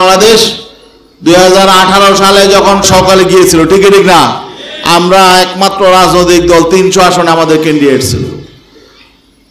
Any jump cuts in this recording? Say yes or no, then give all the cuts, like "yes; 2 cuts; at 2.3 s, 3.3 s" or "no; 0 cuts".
yes; 1 cut; at 2.8 s